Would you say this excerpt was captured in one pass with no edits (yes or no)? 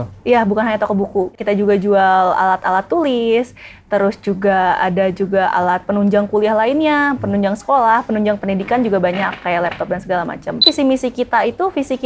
no